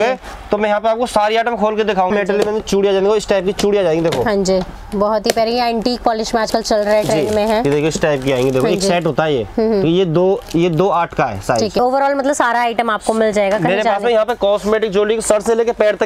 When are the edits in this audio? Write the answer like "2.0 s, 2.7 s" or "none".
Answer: 2.1 s, 4.8 s, 11.8 s

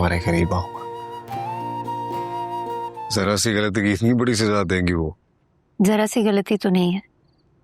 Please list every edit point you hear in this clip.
3.0 s

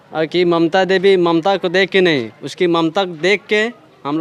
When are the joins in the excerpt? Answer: none

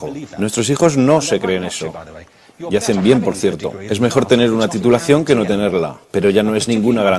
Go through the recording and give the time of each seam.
4.8 s

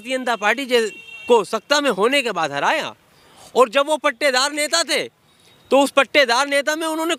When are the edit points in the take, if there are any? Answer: none

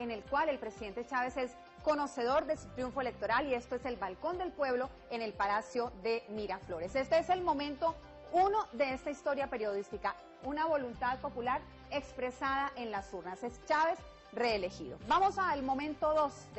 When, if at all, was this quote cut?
none

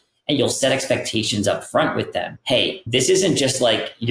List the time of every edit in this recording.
2.7 s

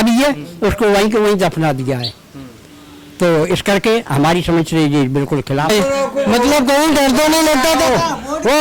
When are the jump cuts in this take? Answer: 5.7 s

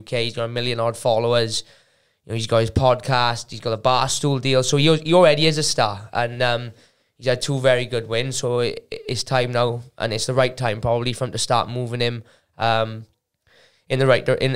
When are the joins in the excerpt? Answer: none

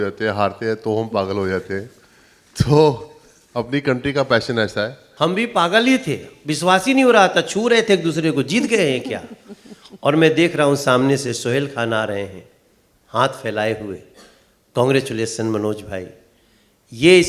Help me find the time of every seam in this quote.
5.0 s

